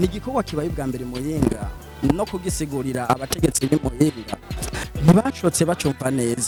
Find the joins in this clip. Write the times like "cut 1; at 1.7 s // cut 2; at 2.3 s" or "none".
none